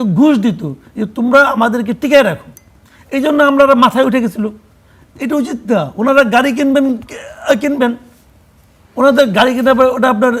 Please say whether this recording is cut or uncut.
uncut